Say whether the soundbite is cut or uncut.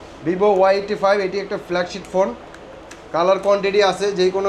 uncut